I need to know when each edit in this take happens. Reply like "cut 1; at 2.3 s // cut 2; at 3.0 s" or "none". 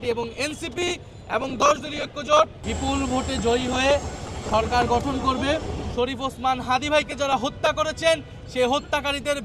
cut 1; at 2.6 s // cut 2; at 5.8 s